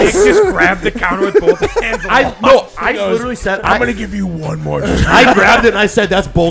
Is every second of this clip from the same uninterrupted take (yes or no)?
yes